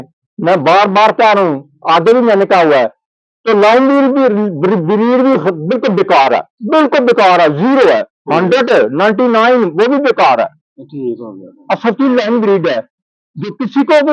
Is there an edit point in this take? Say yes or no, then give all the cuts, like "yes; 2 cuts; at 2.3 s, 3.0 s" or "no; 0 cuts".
no; 0 cuts